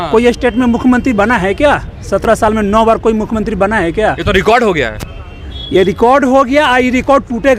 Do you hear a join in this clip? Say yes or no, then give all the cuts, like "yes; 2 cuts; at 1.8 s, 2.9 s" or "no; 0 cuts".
no; 0 cuts